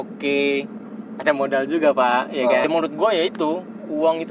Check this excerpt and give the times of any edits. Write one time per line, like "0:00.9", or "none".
0:02.6